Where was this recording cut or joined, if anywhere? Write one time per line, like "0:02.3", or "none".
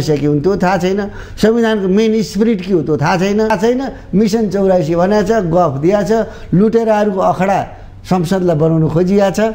0:03.5

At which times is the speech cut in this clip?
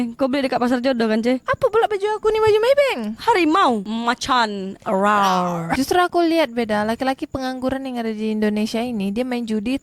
0:03.9
0:05.7

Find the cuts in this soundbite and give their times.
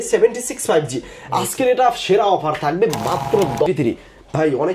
0:03.7

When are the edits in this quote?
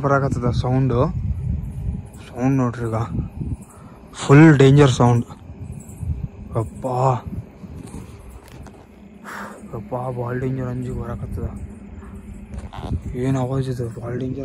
none

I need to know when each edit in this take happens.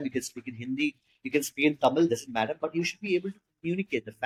none

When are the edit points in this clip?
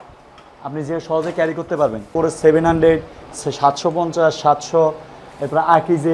0:02.1

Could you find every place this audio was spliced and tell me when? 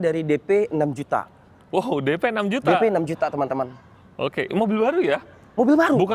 none

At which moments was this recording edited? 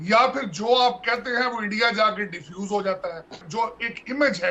0:03.4

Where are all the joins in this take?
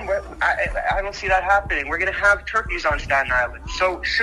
none

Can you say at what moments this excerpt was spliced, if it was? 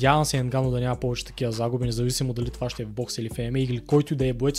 none

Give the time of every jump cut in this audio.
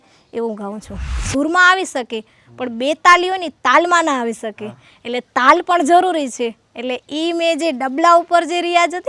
0:01.1

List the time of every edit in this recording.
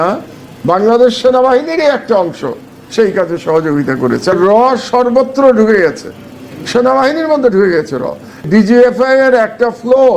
0:04.3
0:08.5

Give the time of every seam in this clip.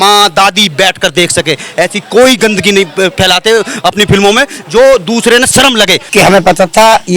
0:06.0

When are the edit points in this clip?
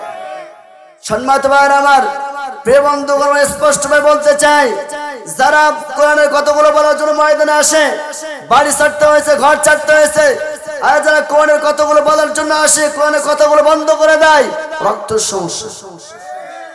0:06.0
0:10.6

